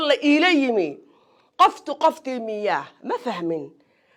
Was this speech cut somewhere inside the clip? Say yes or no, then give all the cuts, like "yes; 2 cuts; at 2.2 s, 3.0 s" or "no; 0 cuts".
no; 0 cuts